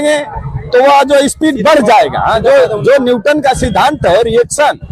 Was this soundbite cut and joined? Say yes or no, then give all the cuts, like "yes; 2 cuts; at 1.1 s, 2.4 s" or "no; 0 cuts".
no; 0 cuts